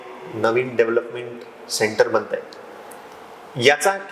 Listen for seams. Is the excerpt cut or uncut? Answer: uncut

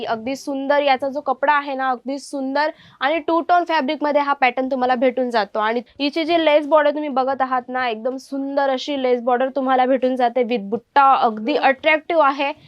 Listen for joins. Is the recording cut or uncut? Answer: cut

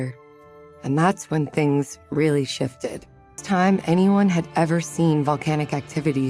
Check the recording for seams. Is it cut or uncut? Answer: cut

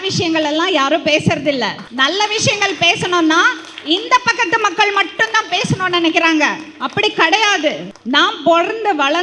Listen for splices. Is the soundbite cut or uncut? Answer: cut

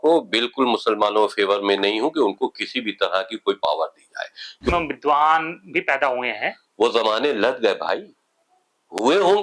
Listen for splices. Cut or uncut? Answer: cut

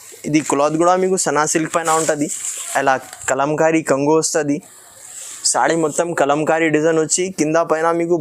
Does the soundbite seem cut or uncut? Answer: uncut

